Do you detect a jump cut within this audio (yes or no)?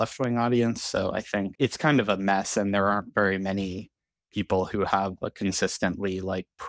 yes